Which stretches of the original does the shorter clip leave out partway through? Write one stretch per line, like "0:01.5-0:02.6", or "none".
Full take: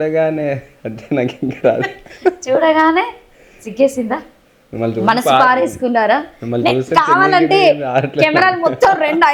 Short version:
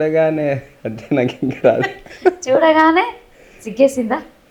none